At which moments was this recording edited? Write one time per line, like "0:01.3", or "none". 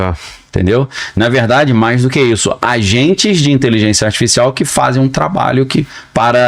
none

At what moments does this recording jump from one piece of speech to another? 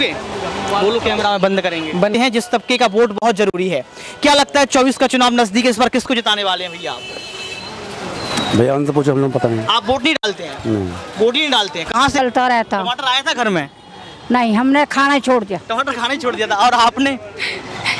0:02.1
0:12.2

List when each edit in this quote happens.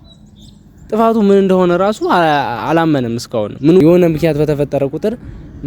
0:03.8

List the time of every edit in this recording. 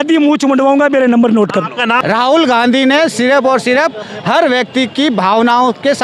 0:02.0

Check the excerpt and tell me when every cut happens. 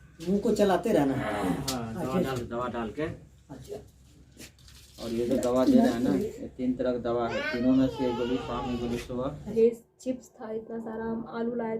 0:09.4

